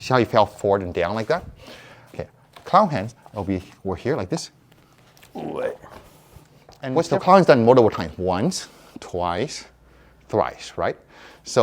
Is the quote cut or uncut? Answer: cut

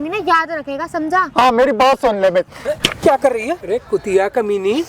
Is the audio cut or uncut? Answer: cut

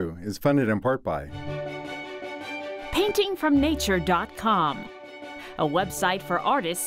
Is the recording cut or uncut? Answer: uncut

